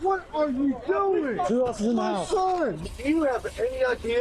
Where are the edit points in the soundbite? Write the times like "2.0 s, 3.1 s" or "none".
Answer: 1.5 s, 2.9 s